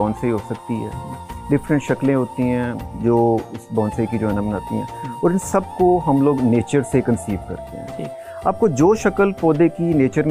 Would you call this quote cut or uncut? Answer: uncut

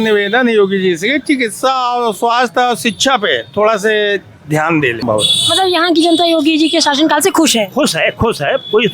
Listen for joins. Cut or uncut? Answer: cut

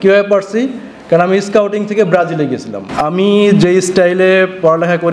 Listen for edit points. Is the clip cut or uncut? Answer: cut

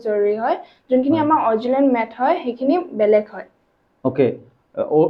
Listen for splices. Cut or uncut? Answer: uncut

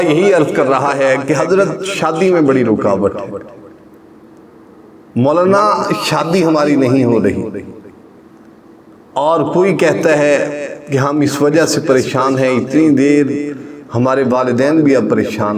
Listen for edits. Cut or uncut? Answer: uncut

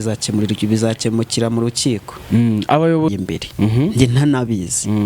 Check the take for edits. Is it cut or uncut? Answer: cut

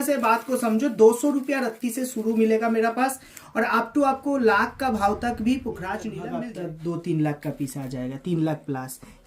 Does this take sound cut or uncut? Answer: cut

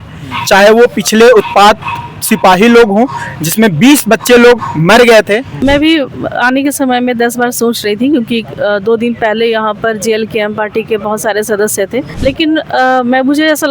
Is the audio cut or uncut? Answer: cut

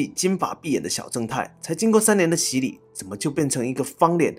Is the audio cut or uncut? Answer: uncut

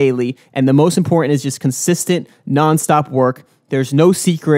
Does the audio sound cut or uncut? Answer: uncut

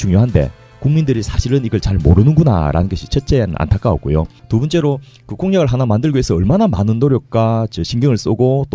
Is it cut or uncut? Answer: cut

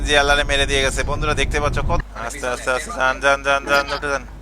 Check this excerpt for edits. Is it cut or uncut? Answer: cut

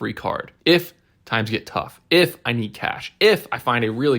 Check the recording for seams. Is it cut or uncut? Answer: uncut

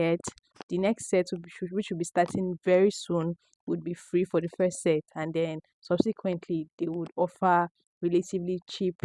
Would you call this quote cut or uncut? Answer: uncut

